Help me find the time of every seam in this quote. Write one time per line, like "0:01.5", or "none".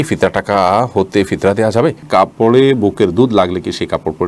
0:02.0